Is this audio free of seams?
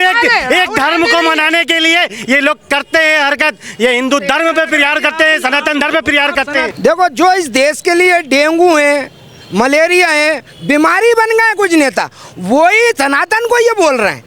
no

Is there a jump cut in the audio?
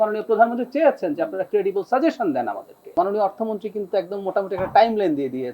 yes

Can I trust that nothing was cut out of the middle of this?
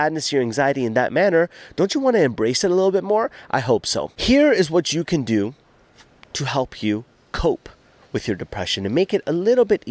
no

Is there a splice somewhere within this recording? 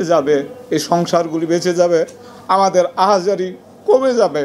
no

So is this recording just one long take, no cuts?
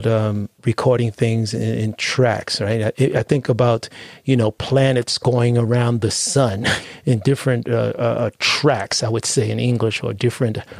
no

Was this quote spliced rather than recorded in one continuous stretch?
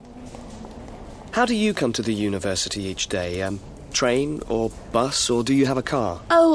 yes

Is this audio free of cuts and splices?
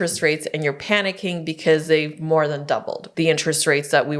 no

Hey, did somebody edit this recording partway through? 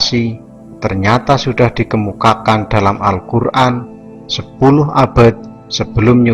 no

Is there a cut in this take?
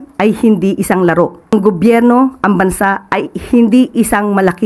yes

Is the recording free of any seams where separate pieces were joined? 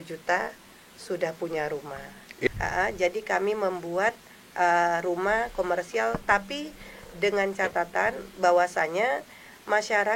no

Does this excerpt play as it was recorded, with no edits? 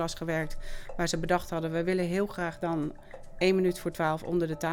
yes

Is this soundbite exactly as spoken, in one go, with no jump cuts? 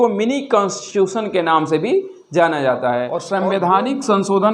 no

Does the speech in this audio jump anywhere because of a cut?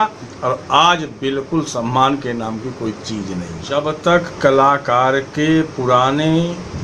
yes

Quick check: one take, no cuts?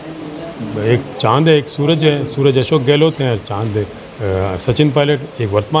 yes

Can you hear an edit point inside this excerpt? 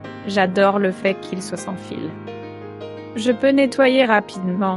no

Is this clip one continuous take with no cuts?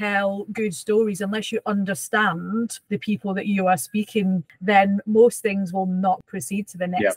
no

